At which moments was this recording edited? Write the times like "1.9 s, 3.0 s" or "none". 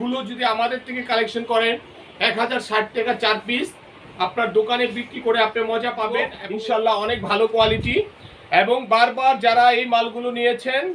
6.4 s